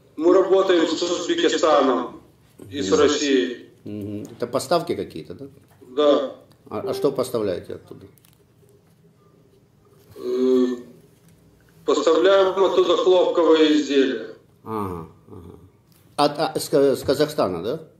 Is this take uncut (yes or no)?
yes